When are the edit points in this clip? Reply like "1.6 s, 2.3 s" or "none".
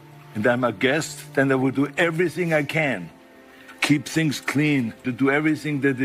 4.8 s